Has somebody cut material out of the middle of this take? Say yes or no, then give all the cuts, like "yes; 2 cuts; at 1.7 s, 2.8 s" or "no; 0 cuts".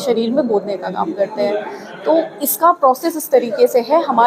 no; 0 cuts